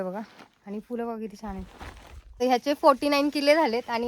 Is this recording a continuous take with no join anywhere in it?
no; 1 cut; at 2.4 s

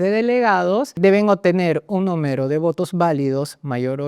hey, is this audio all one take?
no; 1 cut; at 1.0 s

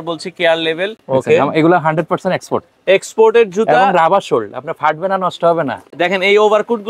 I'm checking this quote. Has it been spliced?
yes; 2 cuts; at 1.0 s, 5.9 s

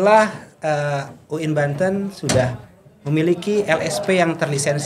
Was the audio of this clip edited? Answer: no; 0 cuts

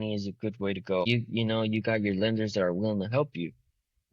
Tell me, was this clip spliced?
yes; 1 cut; at 1.1 s

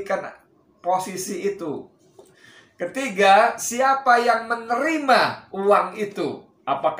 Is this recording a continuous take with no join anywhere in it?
yes; 0 cuts

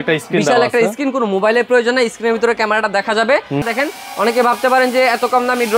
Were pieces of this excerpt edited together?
yes; 1 cut; at 3.6 s

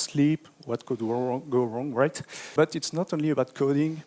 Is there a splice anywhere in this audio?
yes; 1 cut; at 2.5 s

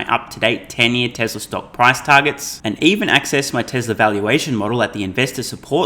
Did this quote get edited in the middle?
no; 0 cuts

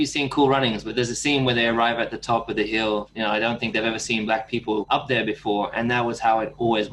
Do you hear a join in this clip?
yes; 3 cuts; at 0.9 s, 3.1 s, 4.9 s

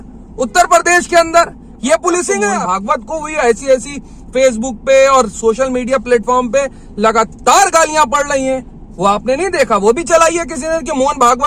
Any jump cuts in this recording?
yes; 1 cut; at 2.5 s

